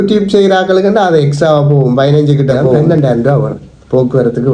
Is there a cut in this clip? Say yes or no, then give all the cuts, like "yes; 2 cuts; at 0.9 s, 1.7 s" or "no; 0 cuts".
yes; 1 cut; at 2.8 s